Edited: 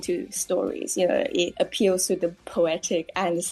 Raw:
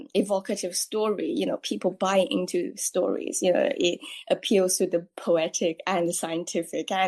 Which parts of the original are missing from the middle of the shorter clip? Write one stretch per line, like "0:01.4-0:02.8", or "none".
0:04.0-0:04.2